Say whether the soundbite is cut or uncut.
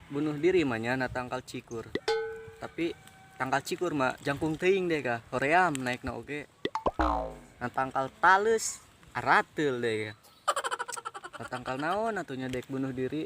cut